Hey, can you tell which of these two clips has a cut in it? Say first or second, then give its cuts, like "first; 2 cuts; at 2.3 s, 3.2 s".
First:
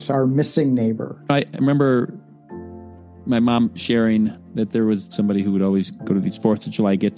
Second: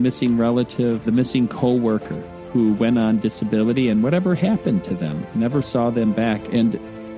first; 1 cut; at 5.1 s